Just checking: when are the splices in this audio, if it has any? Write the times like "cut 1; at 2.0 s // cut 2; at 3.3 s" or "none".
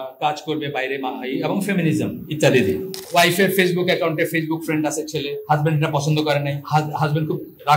cut 1; at 3.0 s // cut 2; at 5.4 s // cut 3; at 6.6 s